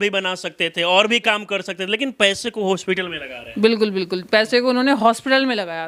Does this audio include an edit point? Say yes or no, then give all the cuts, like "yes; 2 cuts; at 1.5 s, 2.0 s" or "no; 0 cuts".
no; 0 cuts